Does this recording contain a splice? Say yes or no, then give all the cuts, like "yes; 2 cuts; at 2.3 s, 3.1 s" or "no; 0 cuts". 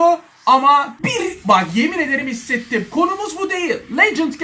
yes; 1 cut; at 0.9 s